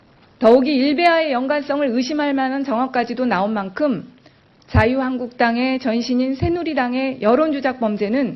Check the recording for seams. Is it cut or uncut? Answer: cut